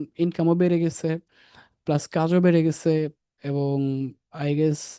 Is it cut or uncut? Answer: uncut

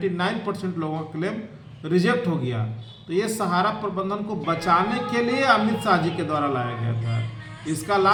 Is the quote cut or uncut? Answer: uncut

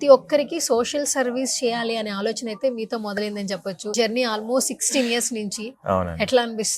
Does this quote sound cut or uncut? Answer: cut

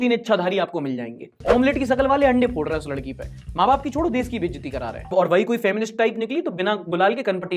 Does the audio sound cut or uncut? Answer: cut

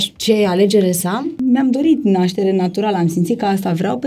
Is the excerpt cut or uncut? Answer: cut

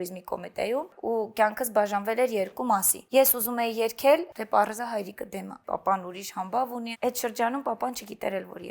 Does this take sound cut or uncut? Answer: cut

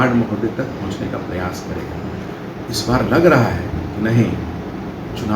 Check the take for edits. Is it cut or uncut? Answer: uncut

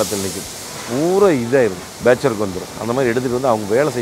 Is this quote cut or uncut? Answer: cut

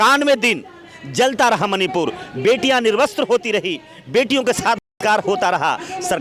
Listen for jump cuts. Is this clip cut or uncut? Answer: uncut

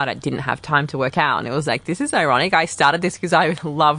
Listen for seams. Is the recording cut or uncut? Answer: uncut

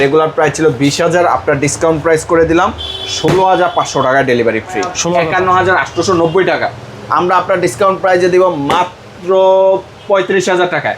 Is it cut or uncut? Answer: cut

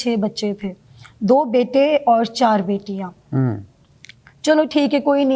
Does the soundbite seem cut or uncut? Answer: uncut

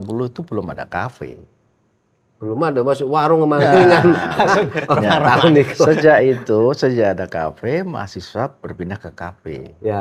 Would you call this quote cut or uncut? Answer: uncut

